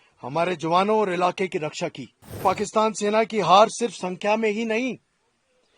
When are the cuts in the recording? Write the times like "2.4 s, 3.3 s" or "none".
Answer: 2.4 s